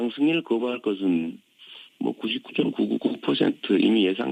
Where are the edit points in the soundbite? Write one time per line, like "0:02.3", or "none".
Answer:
none